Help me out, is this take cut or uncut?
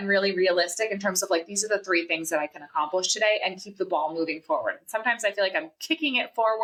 uncut